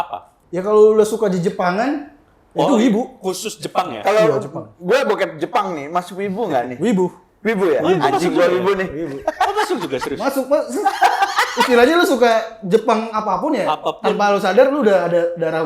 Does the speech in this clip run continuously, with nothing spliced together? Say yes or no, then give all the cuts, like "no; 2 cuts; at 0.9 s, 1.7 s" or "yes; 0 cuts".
yes; 0 cuts